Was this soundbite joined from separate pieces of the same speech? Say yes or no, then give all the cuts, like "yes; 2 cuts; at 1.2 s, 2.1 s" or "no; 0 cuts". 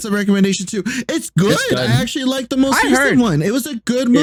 no; 0 cuts